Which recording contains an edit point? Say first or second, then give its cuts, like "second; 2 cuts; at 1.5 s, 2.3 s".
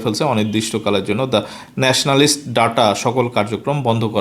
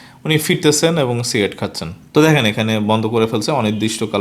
second; 1 cut; at 1.9 s